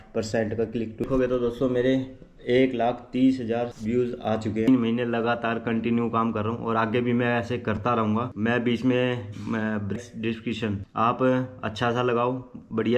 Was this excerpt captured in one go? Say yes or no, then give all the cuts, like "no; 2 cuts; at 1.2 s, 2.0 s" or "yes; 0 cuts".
no; 3 cuts; at 1.0 s, 4.7 s, 9.9 s